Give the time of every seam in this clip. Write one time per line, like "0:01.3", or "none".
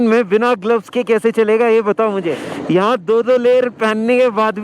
0:02.5